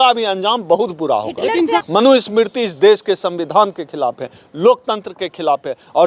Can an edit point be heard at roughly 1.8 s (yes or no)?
yes